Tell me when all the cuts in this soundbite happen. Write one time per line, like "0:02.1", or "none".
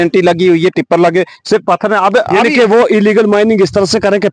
none